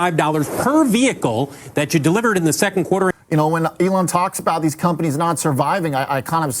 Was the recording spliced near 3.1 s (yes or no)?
yes